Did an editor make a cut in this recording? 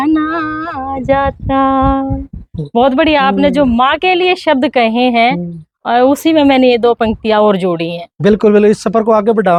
no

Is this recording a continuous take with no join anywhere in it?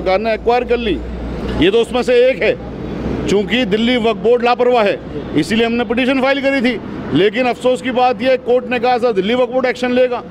yes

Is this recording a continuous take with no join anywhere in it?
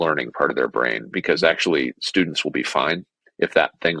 yes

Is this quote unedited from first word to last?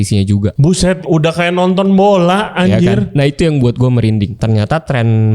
no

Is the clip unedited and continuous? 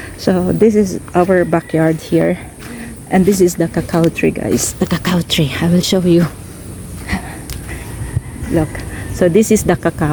yes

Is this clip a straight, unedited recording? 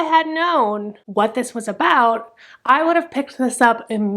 no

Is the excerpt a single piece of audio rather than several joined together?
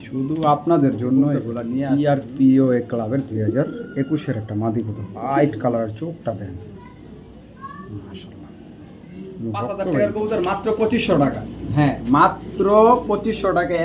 no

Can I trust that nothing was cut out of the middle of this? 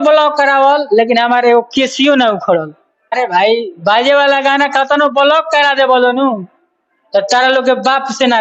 no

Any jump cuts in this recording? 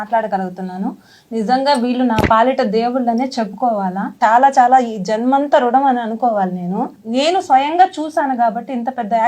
yes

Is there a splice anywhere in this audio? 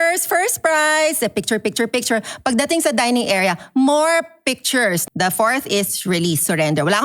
yes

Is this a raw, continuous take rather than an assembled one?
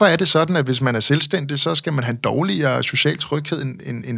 yes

